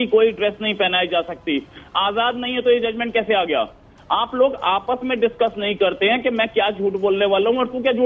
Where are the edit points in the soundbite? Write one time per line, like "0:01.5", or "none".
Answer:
none